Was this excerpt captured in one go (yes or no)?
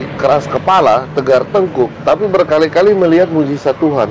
yes